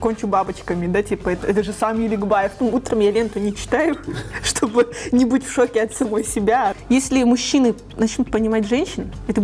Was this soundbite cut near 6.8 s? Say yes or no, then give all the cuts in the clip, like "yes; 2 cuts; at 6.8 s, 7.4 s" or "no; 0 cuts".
yes; 2 cuts; at 2.6 s, 6.8 s